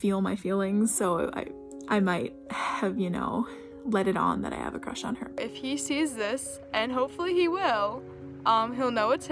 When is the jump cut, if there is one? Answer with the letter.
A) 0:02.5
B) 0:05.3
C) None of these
B